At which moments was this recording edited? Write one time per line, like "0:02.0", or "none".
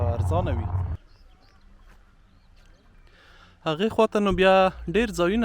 0:00.9